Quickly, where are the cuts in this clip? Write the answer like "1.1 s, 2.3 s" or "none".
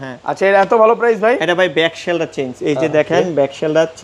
none